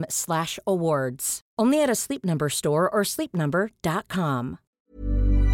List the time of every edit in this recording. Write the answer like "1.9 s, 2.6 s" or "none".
4.6 s